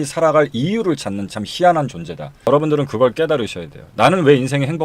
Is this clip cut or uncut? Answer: cut